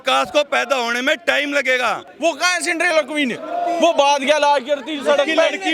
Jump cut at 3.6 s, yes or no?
no